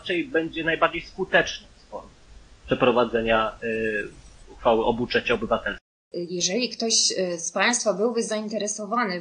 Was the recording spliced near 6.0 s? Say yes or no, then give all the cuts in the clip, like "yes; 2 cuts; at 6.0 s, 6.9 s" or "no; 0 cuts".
yes; 1 cut; at 6.0 s